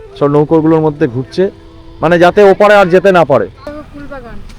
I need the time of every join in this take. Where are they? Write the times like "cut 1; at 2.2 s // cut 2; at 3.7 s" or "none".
cut 1; at 3.6 s